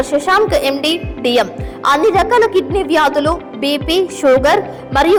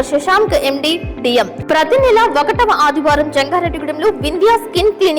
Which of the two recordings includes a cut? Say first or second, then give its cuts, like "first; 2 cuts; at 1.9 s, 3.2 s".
second; 1 cut; at 1.6 s